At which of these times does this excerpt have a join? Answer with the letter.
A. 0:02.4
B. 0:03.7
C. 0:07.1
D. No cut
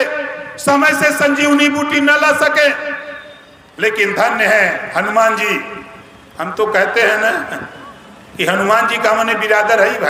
D